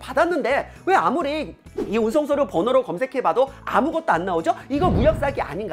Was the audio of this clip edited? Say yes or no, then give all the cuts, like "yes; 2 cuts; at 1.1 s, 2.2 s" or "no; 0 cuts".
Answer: no; 0 cuts